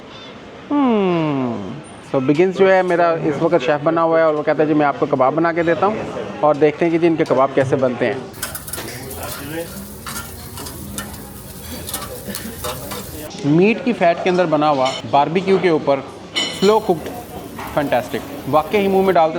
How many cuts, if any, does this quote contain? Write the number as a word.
three